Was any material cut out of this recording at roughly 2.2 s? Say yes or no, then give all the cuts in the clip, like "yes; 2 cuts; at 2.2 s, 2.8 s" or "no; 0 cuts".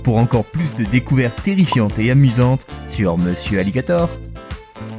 no; 1 cut; at 4.1 s